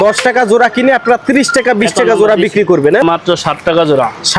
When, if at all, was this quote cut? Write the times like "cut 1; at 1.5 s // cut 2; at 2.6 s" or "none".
cut 1; at 3.0 s

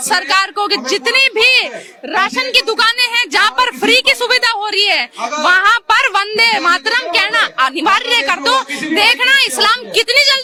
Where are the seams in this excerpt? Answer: none

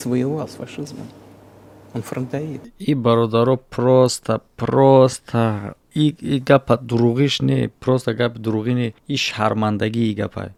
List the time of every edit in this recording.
none

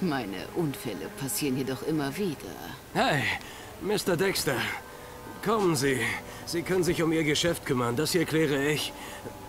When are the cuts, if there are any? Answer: cut 1; at 3.4 s

